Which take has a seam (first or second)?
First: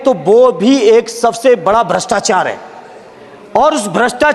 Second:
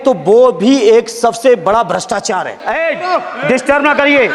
second